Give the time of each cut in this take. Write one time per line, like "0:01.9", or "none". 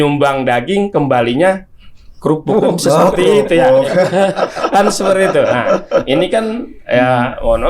none